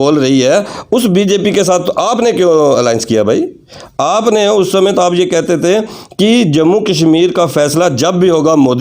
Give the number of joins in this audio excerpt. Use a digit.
0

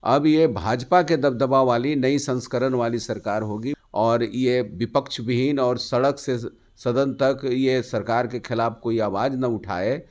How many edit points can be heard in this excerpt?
1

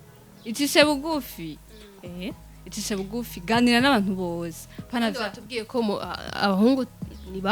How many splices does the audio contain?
0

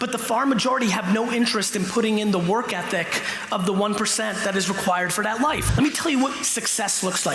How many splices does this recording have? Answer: 1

